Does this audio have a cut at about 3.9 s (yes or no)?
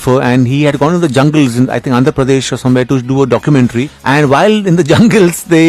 yes